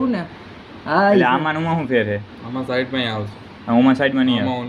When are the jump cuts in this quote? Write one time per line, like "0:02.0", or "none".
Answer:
none